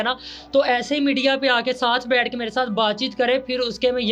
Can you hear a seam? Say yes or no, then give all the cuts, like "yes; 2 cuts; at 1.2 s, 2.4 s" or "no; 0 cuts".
no; 0 cuts